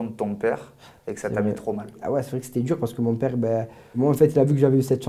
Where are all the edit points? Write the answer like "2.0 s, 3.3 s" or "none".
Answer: 2.0 s, 4.0 s

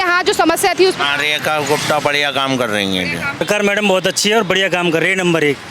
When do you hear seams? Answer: 3.4 s

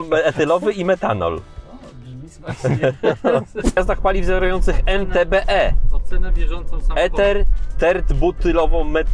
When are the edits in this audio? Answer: 3.8 s

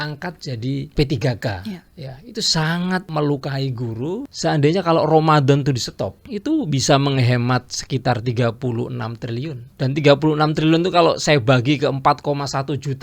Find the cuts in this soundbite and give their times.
0.9 s, 3.1 s, 4.3 s, 6.2 s, 9.7 s

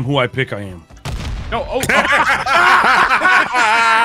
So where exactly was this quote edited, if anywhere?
none

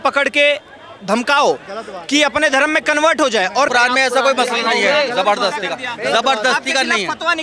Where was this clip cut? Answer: 3.7 s

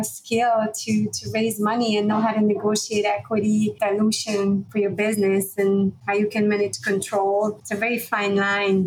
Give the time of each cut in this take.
3.7 s, 4.7 s, 6.0 s, 7.6 s

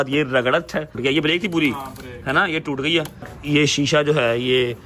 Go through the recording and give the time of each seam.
1.0 s, 3.3 s

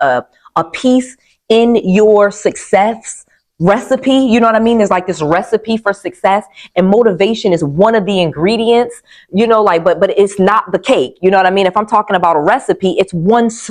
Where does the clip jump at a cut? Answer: none

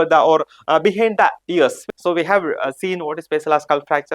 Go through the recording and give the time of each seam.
1.9 s

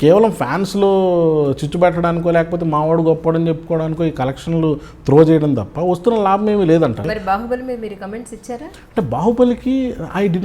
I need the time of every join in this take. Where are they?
7.1 s

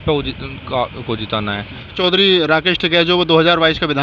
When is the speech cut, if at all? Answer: 1.9 s

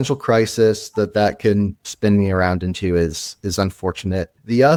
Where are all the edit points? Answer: none

